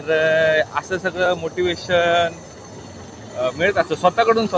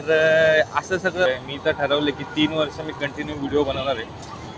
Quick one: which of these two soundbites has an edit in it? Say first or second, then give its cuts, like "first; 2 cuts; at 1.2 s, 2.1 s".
second; 1 cut; at 1.3 s